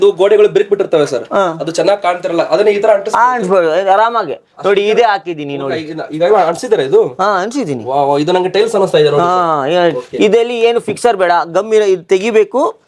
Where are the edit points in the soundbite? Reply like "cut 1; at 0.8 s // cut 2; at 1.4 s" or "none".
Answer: none